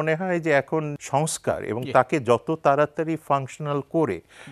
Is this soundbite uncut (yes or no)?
no